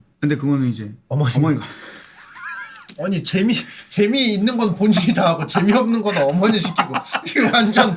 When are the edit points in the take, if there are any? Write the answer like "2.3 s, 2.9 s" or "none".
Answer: none